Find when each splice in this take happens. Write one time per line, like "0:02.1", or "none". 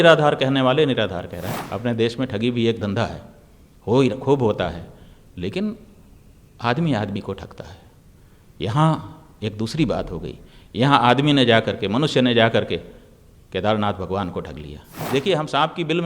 0:01.4
0:15.0